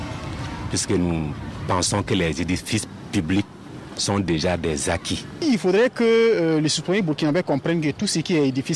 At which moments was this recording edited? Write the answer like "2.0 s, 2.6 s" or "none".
none